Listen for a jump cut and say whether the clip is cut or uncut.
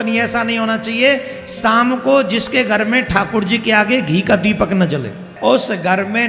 cut